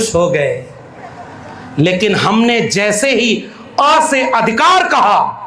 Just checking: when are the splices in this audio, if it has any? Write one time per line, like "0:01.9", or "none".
none